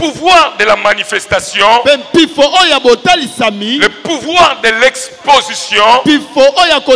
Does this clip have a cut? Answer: no; 0 cuts

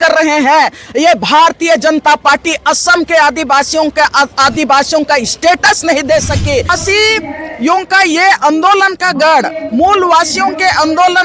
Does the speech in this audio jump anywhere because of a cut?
yes; 1 cut; at 6.7 s

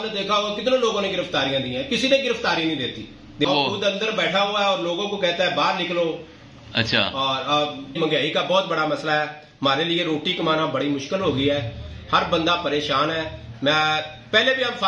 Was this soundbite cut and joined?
yes; 2 cuts; at 3.4 s, 7.9 s

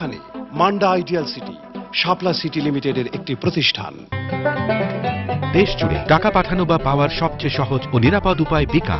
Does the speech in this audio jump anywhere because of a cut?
yes; 1 cut; at 3.9 s

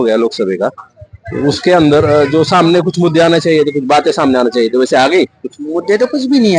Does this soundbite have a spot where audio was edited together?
no; 0 cuts

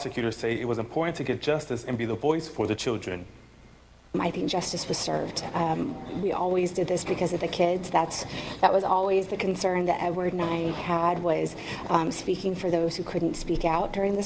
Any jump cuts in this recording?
no; 0 cuts

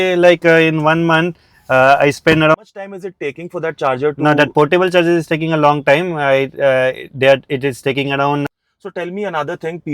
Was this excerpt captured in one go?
no; 2 cuts; at 2.6 s, 8.5 s

